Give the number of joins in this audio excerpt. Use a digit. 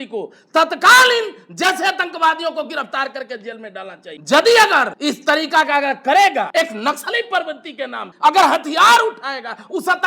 4